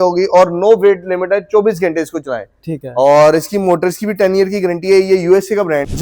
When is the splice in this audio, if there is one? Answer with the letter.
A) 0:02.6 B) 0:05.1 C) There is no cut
C